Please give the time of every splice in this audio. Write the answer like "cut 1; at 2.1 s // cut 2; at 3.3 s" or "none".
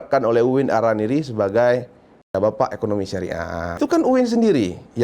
cut 1; at 3.8 s